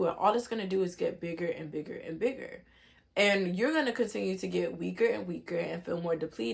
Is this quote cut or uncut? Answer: uncut